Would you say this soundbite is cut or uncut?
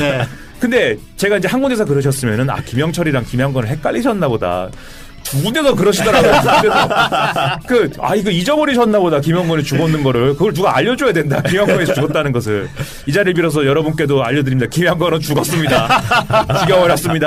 uncut